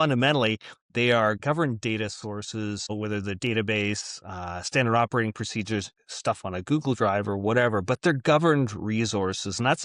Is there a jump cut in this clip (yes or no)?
yes